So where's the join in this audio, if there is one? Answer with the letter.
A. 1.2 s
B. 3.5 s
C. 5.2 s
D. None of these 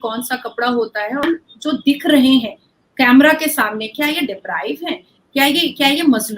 A